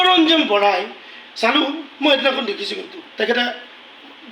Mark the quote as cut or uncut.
cut